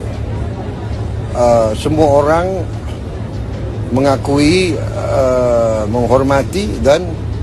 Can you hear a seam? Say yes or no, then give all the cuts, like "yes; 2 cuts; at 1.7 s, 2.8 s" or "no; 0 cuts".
no; 0 cuts